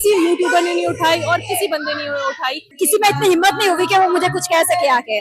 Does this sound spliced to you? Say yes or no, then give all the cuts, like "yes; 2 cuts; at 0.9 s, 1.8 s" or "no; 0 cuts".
yes; 1 cut; at 2.7 s